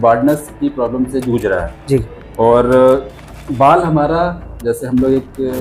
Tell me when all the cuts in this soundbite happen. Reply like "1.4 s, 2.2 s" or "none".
none